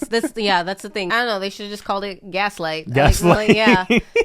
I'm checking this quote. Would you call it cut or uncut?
cut